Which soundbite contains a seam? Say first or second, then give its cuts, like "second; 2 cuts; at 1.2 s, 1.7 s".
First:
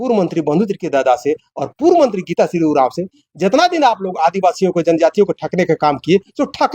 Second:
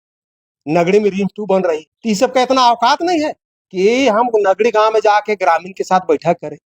second; 1 cut; at 1.9 s